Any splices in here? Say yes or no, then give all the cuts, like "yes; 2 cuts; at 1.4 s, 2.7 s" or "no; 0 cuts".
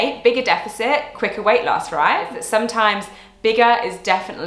yes; 1 cut; at 2.4 s